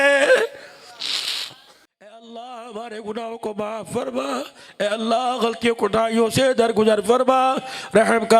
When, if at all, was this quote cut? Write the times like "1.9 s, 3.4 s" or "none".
2.2 s